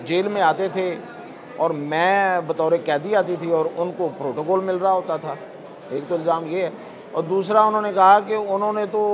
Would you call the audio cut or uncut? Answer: uncut